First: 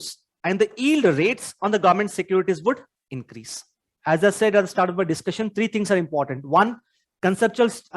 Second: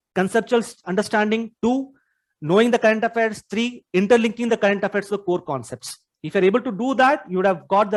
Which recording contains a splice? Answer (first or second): first